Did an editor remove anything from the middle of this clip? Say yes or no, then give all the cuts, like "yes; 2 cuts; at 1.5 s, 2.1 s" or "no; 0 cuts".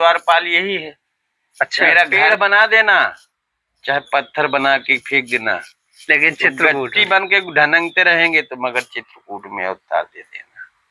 yes; 1 cut; at 2.3 s